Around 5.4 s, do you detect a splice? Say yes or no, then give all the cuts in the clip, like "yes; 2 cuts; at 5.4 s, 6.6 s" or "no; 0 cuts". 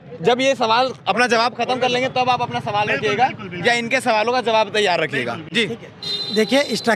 no; 0 cuts